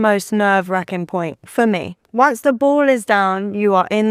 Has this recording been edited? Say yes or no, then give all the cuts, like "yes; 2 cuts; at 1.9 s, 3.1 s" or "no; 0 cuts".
yes; 1 cut; at 2.0 s